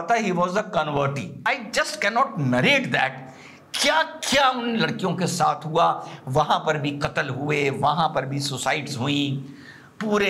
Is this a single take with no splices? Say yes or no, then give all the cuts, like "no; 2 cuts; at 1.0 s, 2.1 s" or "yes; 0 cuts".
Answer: no; 1 cut; at 1.3 s